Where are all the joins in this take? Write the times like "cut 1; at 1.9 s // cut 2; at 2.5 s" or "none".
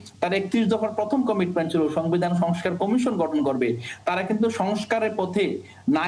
none